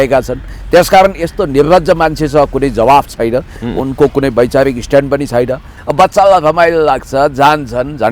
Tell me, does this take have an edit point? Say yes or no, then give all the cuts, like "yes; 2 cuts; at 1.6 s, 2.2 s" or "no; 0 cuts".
yes; 1 cut; at 5.7 s